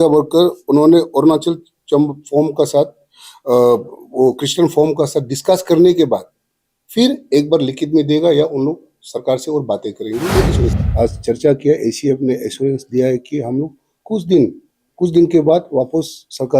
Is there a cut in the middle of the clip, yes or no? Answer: yes